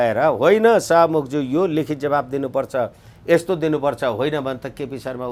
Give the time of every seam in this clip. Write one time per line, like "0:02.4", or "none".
none